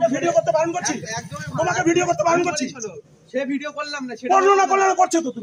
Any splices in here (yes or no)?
no